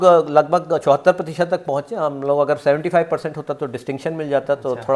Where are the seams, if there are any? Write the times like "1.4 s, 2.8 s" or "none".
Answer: none